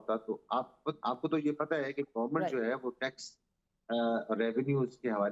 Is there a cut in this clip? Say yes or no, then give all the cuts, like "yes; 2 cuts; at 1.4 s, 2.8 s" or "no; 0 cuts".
no; 0 cuts